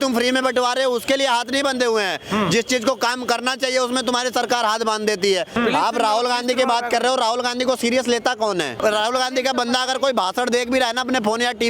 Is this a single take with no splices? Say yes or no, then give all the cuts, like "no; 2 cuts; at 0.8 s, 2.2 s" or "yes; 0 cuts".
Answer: no; 2 cuts; at 5.5 s, 8.8 s